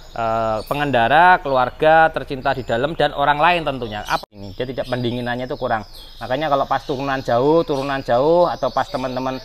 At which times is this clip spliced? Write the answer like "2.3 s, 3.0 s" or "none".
4.2 s